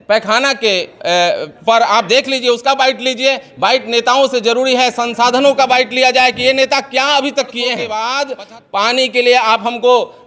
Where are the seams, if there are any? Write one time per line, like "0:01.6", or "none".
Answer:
0:07.9

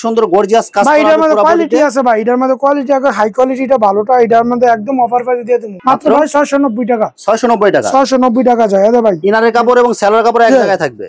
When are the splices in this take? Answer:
none

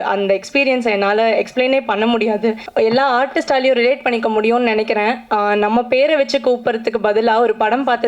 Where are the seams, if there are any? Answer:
0:02.6

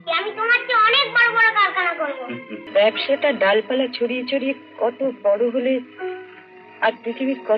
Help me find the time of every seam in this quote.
0:02.6

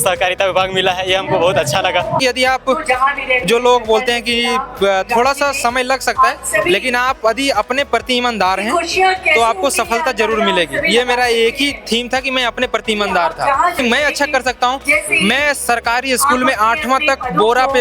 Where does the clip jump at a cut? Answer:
0:02.2
0:13.8

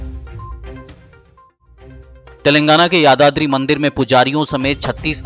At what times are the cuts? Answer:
0:02.3

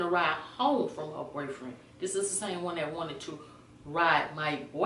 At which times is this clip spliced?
none

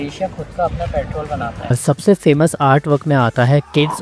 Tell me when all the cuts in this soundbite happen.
0:01.8

